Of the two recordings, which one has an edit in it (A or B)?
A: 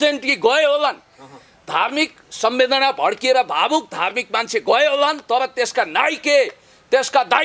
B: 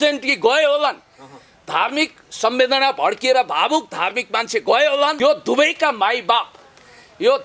B